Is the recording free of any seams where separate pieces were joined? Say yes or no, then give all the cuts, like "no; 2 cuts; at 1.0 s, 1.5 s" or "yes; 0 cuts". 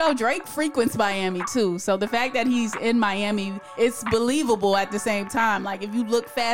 yes; 0 cuts